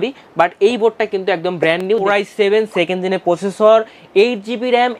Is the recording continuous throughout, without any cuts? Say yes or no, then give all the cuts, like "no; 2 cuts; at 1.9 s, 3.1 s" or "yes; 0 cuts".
no; 1 cut; at 2.0 s